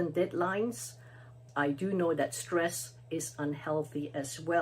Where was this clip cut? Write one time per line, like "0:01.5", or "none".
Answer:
0:01.4